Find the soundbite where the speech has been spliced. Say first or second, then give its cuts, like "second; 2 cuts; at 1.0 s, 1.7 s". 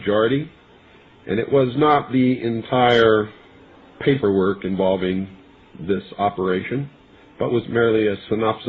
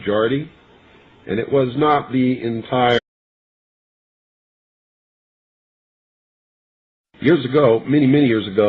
first; 1 cut; at 3.0 s